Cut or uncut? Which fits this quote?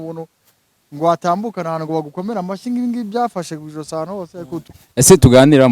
cut